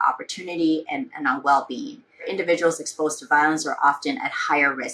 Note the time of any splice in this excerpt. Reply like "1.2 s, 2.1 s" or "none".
2.3 s